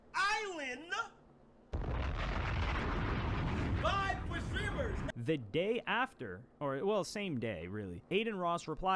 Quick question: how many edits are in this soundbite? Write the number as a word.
one